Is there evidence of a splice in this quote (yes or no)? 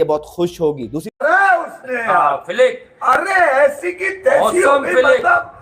yes